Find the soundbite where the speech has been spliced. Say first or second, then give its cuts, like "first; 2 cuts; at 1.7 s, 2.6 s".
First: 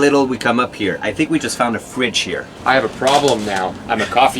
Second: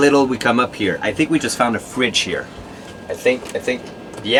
first; 1 cut; at 2.4 s